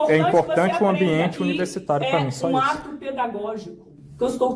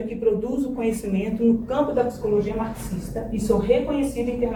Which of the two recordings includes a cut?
first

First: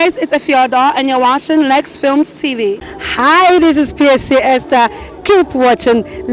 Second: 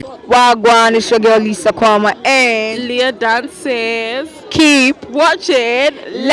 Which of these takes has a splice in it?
first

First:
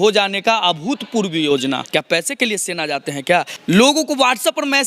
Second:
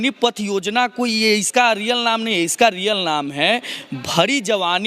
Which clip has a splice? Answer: first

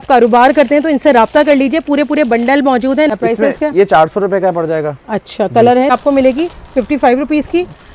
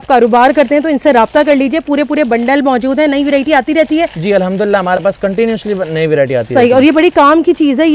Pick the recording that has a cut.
first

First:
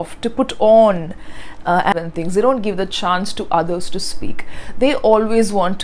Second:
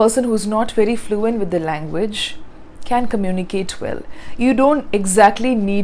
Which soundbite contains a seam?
first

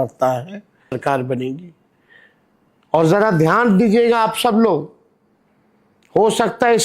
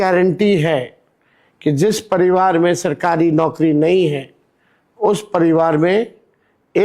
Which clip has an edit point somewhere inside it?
first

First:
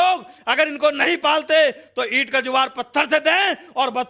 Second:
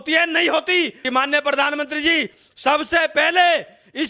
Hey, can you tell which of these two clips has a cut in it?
second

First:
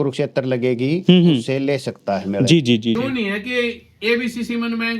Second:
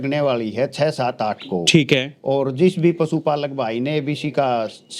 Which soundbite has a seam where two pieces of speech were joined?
first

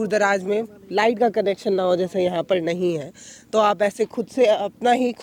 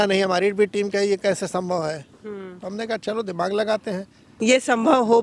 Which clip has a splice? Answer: second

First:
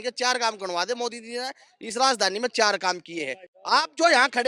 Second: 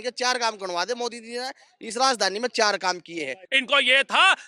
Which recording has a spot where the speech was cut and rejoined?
second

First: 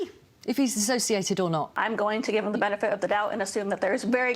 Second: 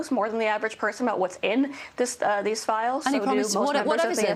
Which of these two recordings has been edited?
first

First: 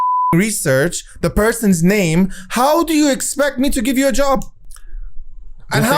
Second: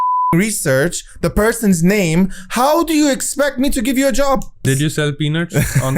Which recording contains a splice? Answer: second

